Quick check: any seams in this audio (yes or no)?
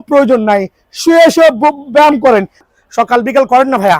yes